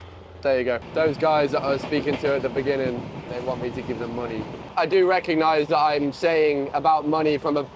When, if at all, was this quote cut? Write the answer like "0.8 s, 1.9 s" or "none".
0.8 s, 3.3 s, 4.6 s